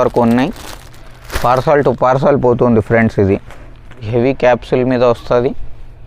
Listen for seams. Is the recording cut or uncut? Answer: cut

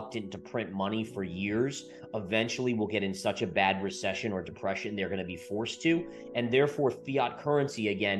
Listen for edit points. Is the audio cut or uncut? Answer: uncut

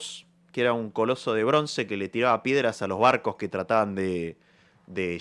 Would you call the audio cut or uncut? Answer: uncut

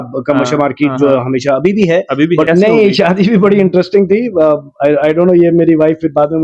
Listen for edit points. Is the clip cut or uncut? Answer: cut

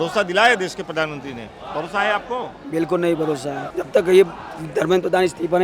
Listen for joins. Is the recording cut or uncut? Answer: cut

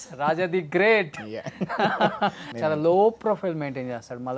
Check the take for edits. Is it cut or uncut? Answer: cut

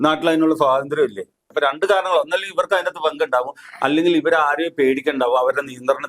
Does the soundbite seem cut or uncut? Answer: cut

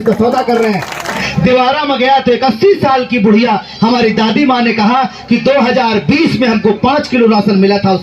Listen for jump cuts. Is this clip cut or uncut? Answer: cut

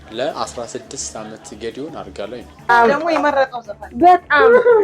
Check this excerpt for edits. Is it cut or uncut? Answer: cut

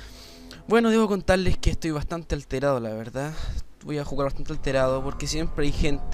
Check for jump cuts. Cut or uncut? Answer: uncut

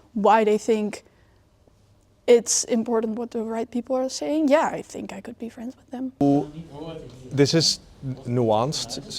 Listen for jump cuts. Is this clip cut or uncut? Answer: cut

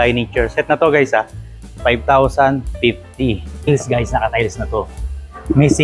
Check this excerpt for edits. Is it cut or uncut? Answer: cut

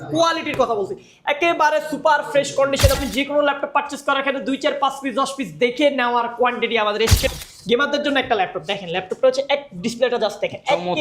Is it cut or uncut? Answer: cut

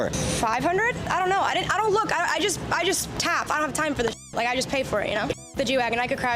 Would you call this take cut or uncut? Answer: cut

